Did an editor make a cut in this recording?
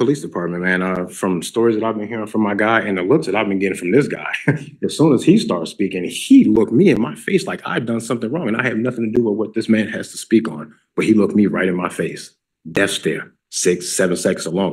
no; 0 cuts

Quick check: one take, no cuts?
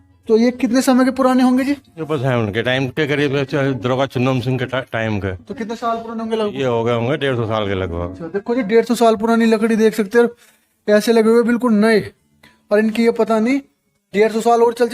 yes; 0 cuts

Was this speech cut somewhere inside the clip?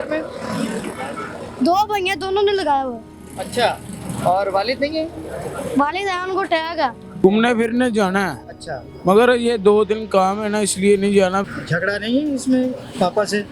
yes; 2 cuts; at 7.2 s, 11.4 s

